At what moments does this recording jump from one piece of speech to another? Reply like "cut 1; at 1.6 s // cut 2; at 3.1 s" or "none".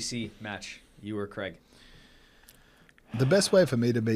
none